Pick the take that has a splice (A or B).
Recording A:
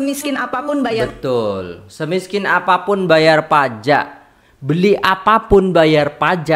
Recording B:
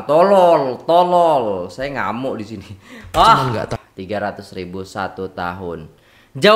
B